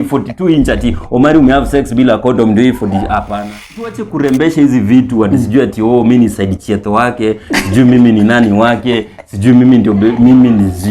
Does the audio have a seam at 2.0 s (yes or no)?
no